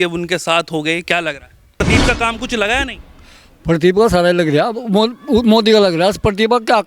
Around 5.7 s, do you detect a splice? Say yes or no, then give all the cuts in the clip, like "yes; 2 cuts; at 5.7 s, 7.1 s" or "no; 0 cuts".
no; 1 cut; at 1.8 s